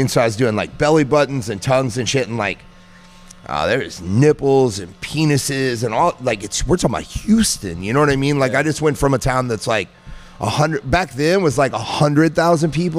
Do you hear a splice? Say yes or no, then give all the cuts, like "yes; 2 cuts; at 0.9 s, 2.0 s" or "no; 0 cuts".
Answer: no; 0 cuts